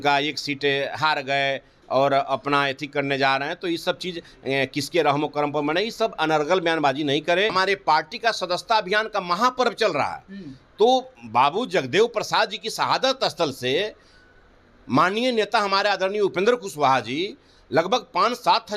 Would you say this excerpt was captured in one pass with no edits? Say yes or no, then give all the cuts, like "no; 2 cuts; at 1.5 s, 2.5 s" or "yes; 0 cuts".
no; 1 cut; at 7.5 s